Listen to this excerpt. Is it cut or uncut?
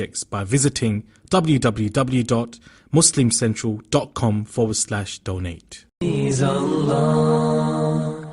cut